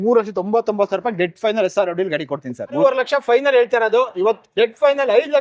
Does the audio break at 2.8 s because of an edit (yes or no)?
yes